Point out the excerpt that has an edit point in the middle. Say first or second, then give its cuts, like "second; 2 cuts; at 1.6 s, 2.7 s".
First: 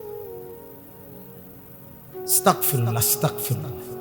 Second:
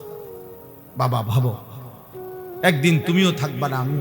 second; 1 cut; at 0.9 s